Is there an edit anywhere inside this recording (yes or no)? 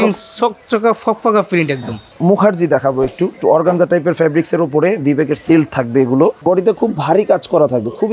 yes